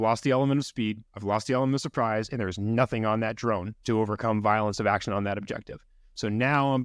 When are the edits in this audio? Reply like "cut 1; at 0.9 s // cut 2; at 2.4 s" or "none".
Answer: cut 1; at 1.1 s // cut 2; at 3.7 s